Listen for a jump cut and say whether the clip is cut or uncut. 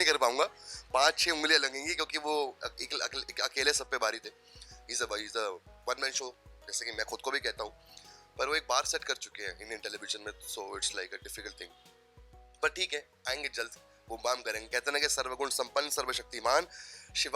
uncut